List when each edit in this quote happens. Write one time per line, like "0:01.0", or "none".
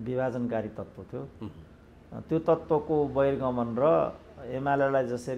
none